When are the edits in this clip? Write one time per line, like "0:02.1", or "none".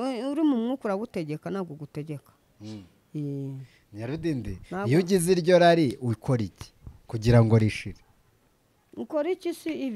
none